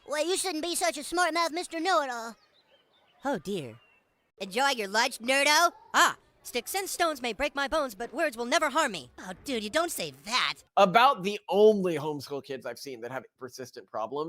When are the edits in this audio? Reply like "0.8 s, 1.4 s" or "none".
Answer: 10.6 s, 13.3 s